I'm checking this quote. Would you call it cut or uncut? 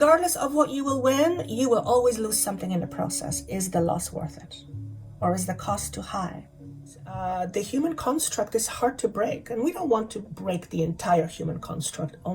cut